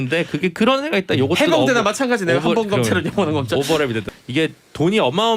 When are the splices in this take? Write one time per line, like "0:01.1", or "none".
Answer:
0:04.1